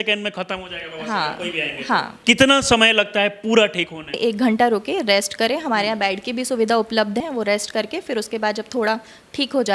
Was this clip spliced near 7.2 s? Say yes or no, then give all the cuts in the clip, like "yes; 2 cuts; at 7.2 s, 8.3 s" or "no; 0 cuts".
yes; 3 cuts; at 2.1 s, 4.2 s, 7.2 s